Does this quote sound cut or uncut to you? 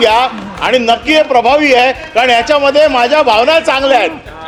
uncut